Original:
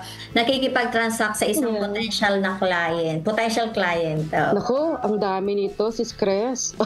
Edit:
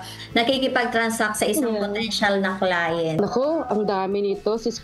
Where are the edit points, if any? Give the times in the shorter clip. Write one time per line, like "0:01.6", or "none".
0:03.2